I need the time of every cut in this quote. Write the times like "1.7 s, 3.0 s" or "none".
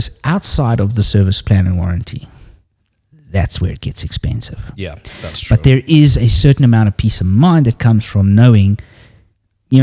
none